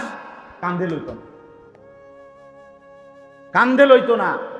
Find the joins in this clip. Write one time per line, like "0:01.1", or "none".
0:01.3
0:03.5